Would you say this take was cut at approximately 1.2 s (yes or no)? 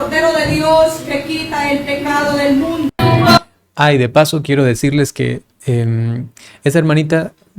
no